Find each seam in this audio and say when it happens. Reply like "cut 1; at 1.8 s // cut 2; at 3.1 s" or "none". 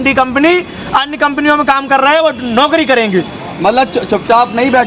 none